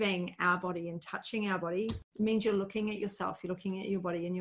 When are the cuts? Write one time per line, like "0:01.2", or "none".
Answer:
0:02.0